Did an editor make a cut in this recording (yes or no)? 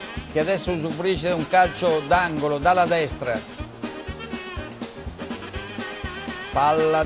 no